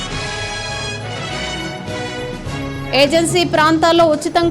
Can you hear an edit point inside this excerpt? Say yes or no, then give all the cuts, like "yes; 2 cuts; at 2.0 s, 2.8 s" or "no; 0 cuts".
no; 0 cuts